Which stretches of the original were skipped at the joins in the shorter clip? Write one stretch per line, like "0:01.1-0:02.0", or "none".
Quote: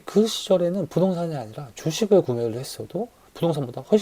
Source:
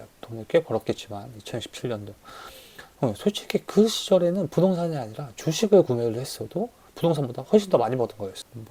none